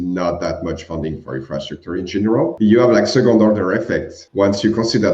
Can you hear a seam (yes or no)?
yes